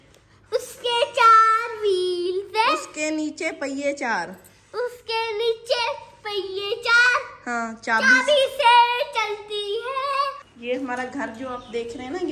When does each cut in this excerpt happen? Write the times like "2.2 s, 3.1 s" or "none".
10.4 s